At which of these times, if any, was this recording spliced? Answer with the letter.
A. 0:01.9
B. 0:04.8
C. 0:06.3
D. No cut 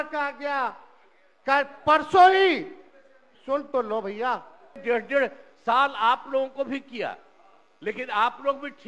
B